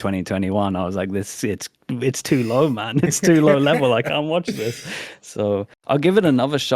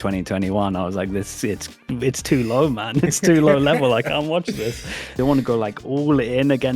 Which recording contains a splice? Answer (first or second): second